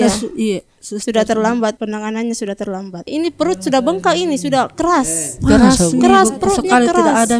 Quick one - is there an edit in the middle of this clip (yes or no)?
yes